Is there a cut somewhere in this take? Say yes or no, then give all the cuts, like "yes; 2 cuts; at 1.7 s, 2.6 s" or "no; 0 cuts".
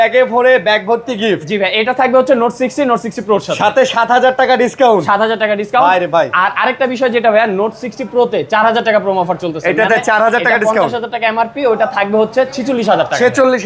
no; 0 cuts